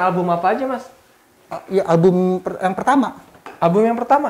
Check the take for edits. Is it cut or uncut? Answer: uncut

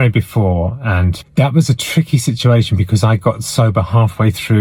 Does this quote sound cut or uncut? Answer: cut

